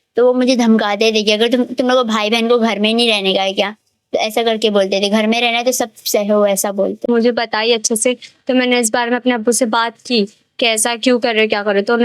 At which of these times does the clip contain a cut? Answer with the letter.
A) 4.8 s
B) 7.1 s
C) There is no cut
B